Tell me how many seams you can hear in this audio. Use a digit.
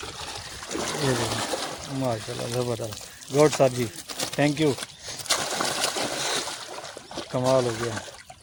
0